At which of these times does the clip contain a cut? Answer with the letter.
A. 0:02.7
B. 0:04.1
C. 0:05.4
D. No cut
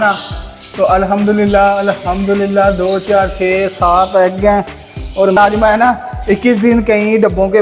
C